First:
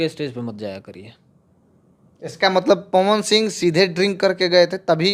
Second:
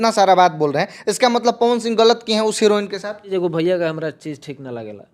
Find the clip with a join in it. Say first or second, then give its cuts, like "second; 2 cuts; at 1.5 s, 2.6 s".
second; 1 cut; at 3.3 s